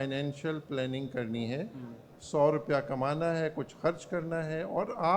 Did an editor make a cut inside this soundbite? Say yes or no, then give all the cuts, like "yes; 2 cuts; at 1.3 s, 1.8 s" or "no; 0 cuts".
no; 0 cuts